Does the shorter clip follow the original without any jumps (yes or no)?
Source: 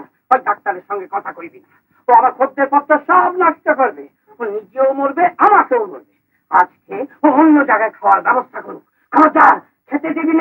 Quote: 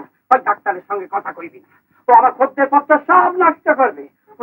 yes